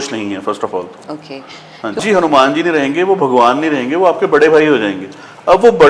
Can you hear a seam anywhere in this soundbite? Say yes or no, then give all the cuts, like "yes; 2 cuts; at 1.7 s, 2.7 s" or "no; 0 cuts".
yes; 1 cut; at 2.0 s